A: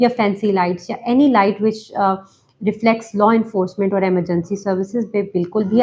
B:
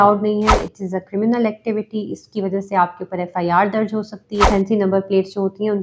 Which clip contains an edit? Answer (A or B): B